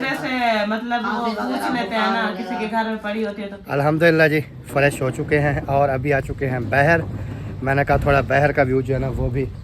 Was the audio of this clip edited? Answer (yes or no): yes